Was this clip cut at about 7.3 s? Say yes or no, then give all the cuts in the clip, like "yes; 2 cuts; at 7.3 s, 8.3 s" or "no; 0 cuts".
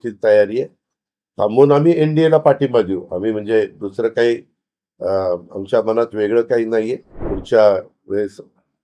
yes; 1 cut; at 7.3 s